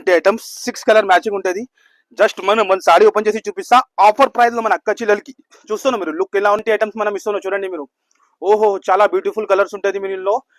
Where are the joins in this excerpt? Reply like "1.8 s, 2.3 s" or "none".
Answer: 6.6 s

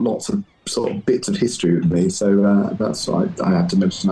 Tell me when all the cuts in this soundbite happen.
none

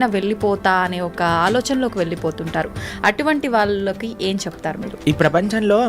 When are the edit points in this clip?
4.9 s

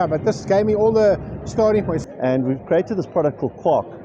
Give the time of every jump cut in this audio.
2.0 s

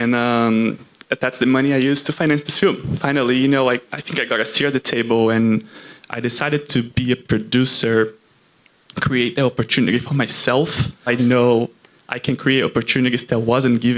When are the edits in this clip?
11.1 s

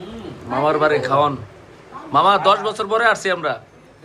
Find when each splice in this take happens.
none

